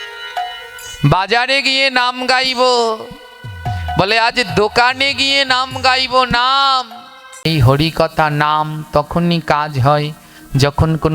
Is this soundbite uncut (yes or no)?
no